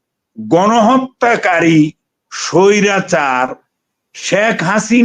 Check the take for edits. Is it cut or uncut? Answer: uncut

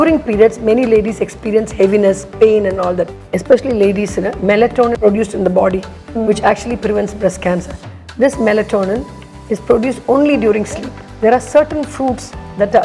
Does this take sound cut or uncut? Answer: cut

